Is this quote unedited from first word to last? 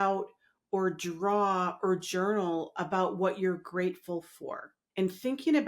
no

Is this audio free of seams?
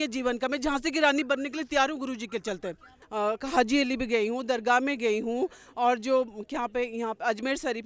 yes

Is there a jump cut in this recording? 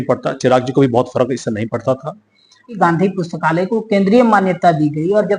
yes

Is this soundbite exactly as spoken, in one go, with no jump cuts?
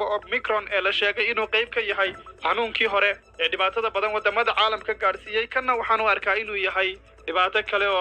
no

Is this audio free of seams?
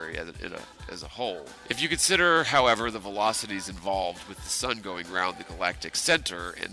no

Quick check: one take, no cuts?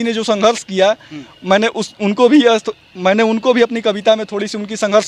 yes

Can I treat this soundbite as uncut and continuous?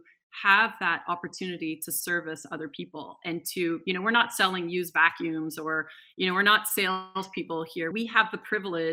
no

